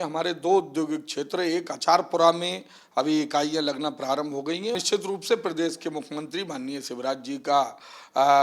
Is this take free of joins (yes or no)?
no